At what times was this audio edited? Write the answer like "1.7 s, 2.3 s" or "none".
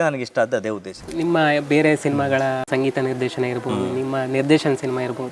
1.1 s, 2.6 s

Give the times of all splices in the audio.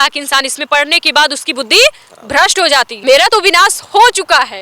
2.9 s

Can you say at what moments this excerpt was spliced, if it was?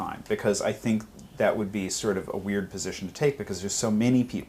2.5 s

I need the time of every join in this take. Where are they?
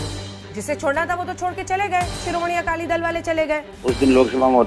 3.7 s

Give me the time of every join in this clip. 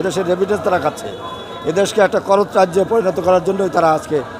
none

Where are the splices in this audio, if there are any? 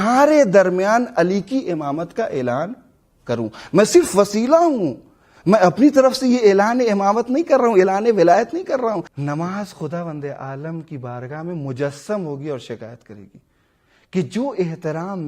9.1 s

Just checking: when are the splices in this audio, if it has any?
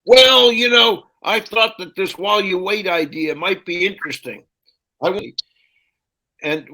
5.2 s

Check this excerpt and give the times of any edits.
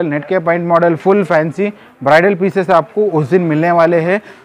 none

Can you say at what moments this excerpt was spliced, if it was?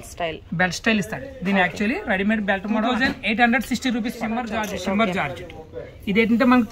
2.9 s, 4.7 s

